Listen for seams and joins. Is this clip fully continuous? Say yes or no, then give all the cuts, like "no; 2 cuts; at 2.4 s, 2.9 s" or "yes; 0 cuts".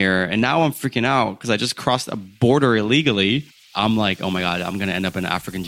no; 1 cut; at 3.7 s